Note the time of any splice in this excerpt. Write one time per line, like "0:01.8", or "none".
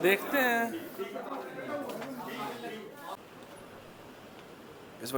none